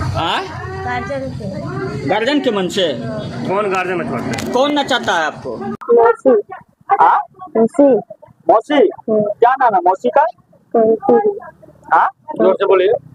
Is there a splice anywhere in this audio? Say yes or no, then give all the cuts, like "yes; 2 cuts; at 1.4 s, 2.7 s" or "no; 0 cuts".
no; 0 cuts